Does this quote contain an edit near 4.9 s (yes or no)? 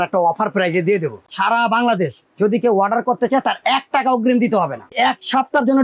yes